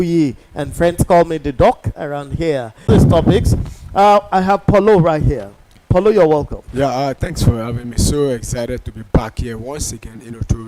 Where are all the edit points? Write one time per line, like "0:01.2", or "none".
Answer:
0:02.9